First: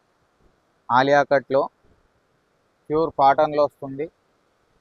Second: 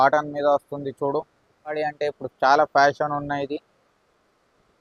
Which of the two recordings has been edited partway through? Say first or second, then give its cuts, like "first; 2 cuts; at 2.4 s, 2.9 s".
second; 1 cut; at 1.8 s